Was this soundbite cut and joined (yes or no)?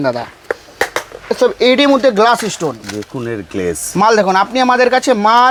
no